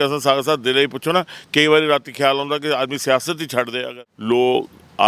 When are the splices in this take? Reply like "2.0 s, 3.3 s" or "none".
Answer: 3.8 s